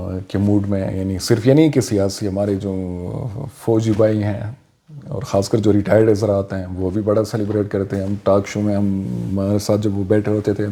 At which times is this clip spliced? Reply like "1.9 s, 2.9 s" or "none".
none